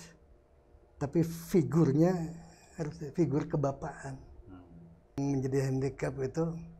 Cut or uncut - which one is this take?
cut